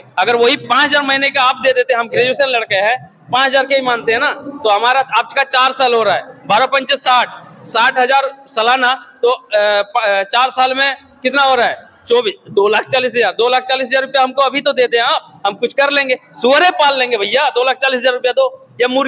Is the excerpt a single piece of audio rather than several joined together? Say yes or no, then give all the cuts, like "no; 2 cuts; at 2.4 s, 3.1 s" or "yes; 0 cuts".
yes; 0 cuts